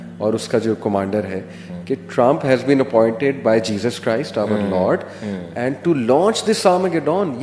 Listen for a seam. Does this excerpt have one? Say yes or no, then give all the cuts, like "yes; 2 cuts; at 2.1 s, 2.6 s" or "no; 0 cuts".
no; 0 cuts